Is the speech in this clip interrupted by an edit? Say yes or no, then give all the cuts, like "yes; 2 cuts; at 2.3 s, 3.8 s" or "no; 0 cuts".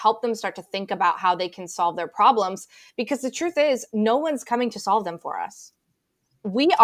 no; 0 cuts